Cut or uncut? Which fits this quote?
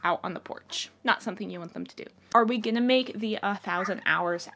cut